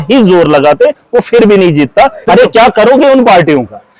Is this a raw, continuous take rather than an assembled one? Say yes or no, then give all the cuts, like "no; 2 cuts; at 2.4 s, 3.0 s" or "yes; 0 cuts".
no; 1 cut; at 2.2 s